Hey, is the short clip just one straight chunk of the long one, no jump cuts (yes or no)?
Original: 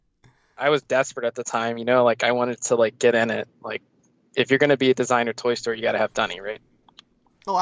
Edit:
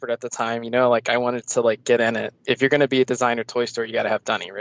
no